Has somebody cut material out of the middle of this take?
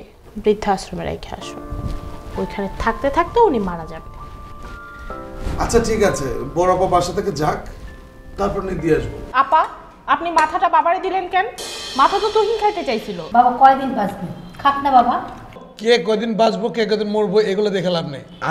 yes; 2 cuts; at 9.2 s, 13.1 s

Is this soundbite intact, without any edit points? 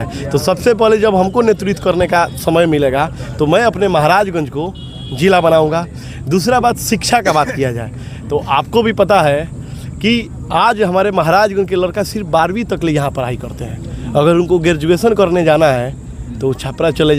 yes; 0 cuts

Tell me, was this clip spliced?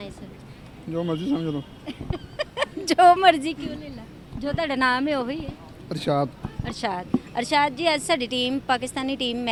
no; 0 cuts

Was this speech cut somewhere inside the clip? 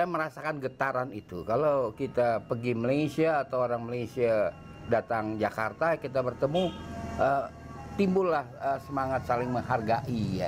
no; 0 cuts

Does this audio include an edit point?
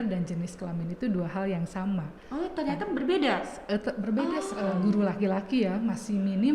yes; 1 cut; at 4.5 s

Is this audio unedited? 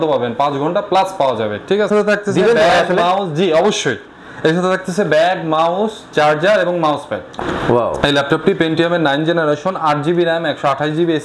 no; 2 cuts; at 1.9 s, 7.3 s

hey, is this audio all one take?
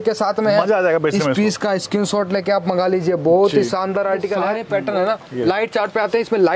no; 1 cut; at 4.5 s

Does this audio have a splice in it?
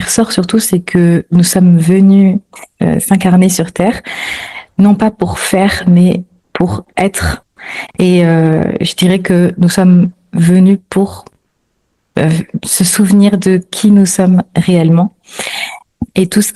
no; 0 cuts

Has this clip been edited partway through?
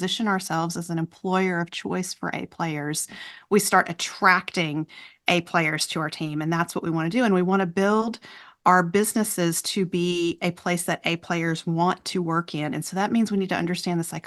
no; 0 cuts

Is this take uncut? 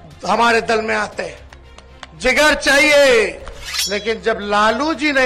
no; 1 cut; at 3.7 s

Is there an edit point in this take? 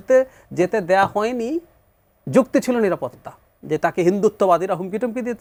no; 0 cuts

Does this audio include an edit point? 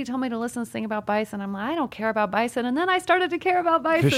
no; 0 cuts

